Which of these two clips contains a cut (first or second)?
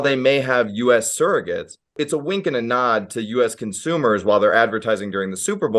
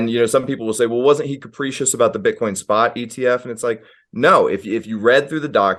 first